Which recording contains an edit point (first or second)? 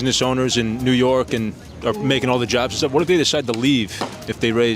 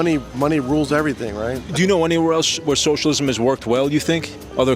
second